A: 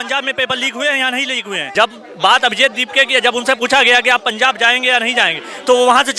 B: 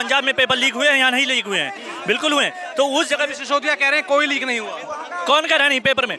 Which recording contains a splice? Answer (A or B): A